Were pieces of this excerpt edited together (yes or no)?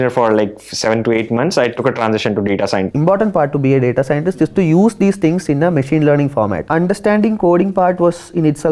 yes